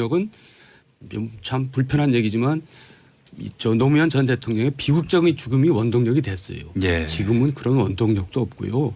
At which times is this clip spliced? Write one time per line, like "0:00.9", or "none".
0:04.3